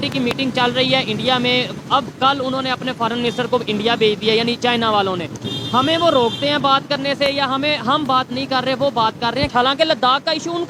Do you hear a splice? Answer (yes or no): no